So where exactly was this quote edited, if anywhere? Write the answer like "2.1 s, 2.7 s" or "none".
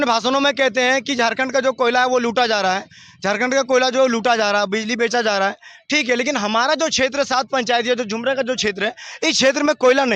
none